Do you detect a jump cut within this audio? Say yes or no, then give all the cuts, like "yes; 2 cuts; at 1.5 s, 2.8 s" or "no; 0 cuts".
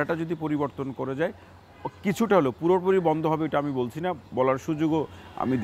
no; 0 cuts